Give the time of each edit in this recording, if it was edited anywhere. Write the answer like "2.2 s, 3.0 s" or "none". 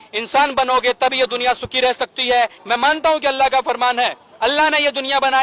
2.6 s